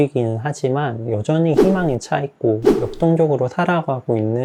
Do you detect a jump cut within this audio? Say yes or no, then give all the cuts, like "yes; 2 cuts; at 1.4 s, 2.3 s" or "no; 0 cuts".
no; 0 cuts